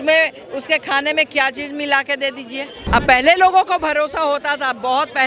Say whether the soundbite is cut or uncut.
cut